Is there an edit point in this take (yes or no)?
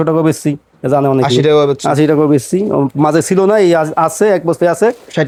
no